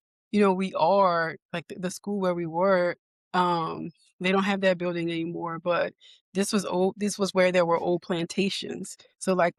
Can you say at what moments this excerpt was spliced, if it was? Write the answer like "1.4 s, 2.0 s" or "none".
none